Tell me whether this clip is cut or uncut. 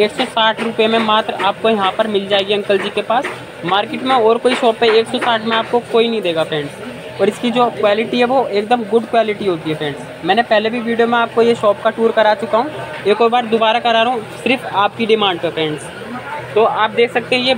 uncut